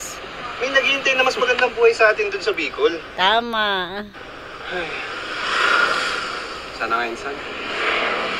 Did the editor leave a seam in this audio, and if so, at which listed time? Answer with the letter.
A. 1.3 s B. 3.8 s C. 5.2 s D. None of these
D